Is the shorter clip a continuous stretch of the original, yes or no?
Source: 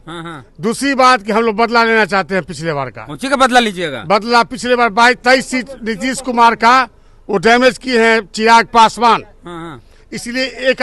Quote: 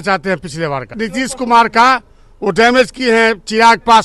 no